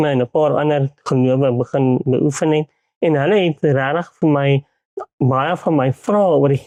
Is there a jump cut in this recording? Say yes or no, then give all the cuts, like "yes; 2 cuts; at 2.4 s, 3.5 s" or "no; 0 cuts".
no; 0 cuts